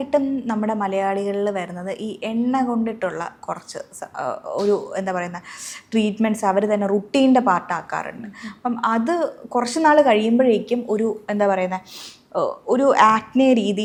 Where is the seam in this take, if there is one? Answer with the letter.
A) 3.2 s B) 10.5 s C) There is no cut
C